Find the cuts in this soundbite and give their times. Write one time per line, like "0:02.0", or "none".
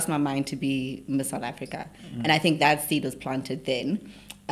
none